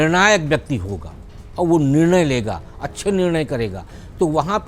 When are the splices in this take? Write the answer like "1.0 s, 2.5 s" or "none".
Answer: none